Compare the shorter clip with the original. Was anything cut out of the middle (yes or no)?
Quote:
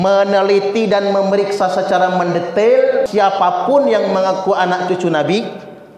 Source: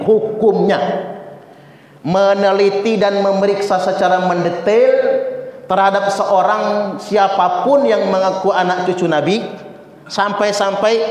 yes